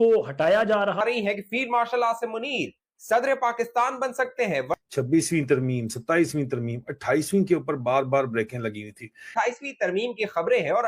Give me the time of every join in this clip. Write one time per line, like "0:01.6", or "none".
0:01.0